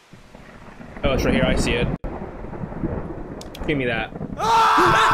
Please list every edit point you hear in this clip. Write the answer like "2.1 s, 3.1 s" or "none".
none